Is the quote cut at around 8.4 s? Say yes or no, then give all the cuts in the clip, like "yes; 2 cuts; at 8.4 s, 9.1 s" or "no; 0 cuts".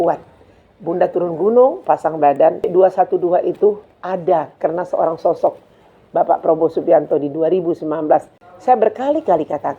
yes; 2 cuts; at 2.6 s, 8.4 s